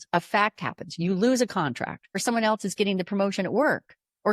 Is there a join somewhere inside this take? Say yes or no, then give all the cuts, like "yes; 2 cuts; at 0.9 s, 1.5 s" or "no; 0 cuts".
yes; 1 cut; at 2.2 s